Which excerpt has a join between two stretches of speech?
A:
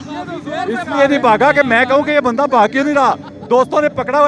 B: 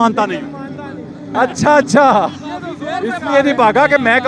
B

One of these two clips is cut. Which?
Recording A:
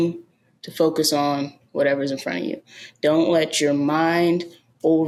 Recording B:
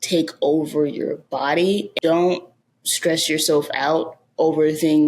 B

